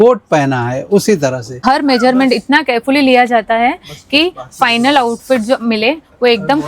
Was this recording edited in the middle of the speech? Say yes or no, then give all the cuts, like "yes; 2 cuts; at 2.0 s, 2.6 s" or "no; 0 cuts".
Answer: yes; 1 cut; at 1.6 s